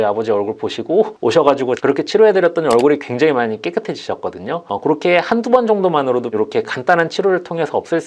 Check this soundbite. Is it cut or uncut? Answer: cut